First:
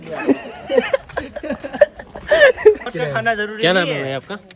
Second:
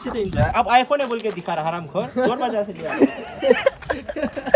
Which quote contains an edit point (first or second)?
first